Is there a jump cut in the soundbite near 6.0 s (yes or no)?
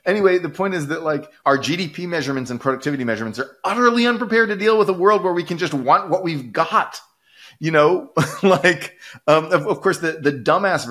no